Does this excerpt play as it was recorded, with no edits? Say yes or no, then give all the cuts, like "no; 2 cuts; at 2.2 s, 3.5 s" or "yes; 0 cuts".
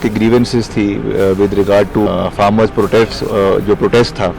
no; 1 cut; at 2.1 s